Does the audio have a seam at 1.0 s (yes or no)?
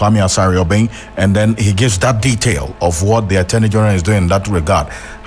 yes